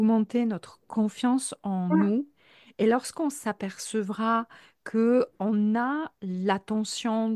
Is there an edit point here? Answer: no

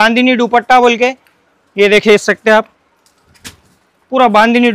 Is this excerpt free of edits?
yes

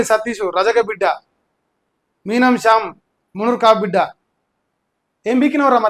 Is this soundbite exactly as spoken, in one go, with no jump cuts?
yes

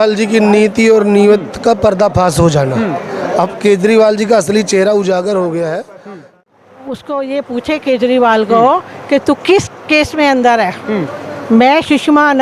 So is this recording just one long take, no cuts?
no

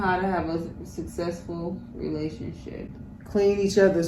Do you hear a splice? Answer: no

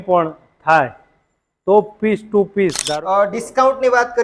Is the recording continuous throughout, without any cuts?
no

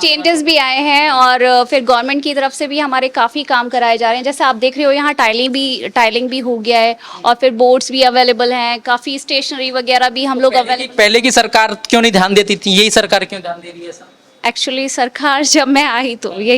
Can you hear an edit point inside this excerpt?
no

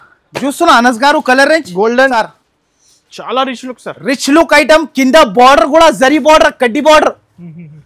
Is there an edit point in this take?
yes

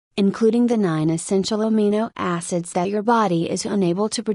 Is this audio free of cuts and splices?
no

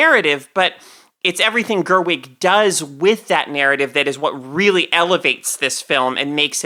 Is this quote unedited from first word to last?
yes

